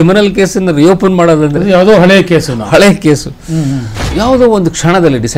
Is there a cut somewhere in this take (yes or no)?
yes